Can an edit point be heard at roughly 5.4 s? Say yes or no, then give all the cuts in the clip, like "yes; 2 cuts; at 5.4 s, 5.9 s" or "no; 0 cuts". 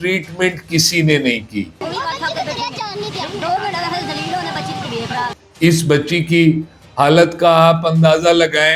yes; 2 cuts; at 1.8 s, 5.4 s